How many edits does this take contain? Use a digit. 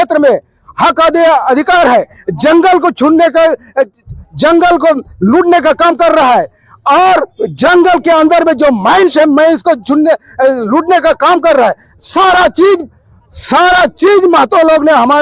0